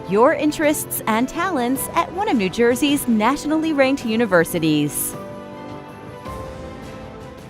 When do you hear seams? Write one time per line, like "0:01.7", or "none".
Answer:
0:04.9